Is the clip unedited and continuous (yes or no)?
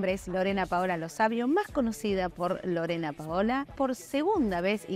no